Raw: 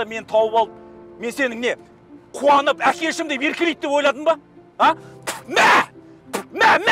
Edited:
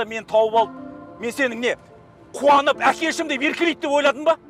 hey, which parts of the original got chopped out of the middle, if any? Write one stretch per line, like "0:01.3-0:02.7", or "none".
none